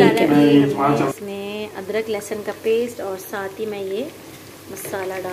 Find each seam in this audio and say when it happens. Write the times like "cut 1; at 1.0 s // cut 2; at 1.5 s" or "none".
cut 1; at 1.1 s